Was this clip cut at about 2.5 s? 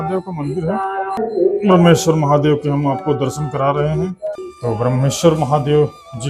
no; 2 cuts; at 1.2 s, 4.4 s

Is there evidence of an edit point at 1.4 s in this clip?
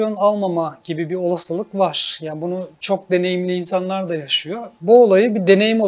no; 2 cuts; at 2.7 s, 4.7 s

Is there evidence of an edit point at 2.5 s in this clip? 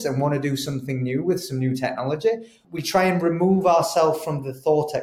yes; 1 cut; at 2.5 s

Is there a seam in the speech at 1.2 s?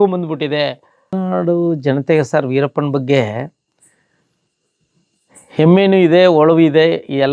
yes; 1 cut; at 1.2 s

